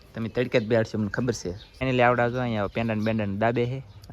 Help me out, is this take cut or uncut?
cut